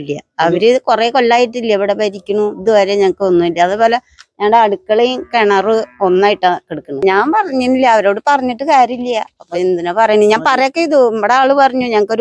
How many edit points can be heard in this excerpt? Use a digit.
1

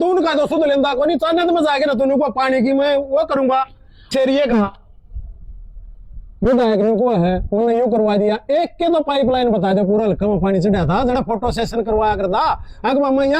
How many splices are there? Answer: 1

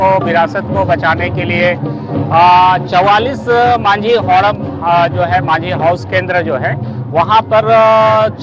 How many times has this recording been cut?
0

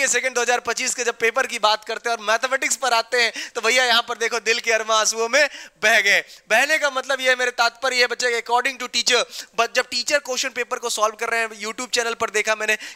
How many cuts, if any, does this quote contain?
0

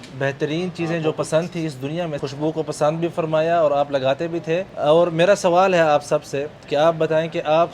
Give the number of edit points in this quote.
2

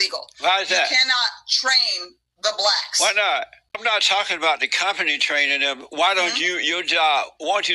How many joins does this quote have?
1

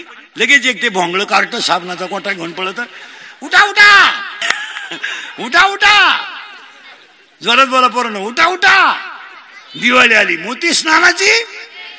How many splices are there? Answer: 1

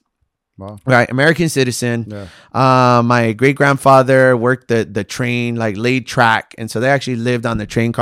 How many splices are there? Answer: 0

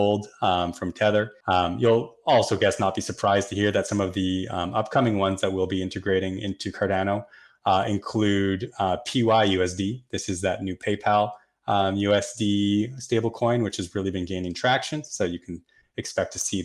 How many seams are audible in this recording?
1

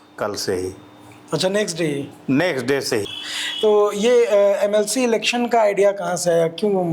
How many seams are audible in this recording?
1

